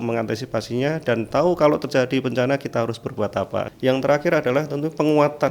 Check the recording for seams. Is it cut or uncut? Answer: cut